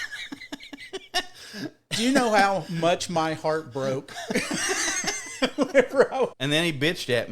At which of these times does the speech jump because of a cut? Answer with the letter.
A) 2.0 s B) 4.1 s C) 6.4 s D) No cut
C